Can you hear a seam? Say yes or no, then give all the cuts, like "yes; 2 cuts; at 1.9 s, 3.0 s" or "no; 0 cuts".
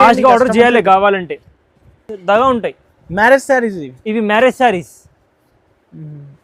no; 0 cuts